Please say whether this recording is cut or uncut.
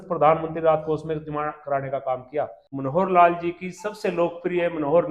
cut